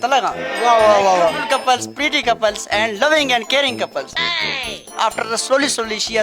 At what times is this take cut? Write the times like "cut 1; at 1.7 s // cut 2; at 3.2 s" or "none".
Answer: cut 1; at 5.0 s